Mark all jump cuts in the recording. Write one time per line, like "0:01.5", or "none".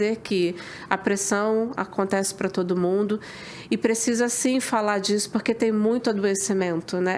none